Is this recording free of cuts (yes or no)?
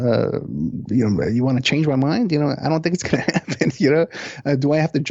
yes